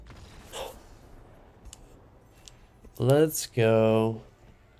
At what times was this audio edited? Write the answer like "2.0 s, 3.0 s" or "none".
none